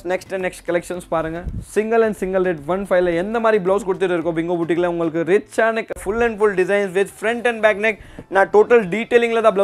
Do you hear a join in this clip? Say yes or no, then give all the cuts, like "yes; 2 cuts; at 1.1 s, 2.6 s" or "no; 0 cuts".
yes; 1 cut; at 5.9 s